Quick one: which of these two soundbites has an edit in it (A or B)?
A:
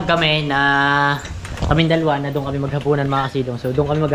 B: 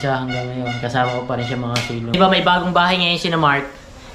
B